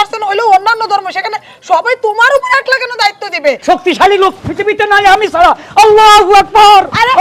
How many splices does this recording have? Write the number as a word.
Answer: one